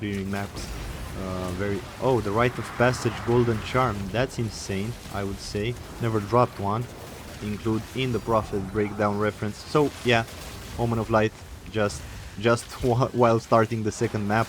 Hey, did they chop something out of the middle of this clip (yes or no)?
yes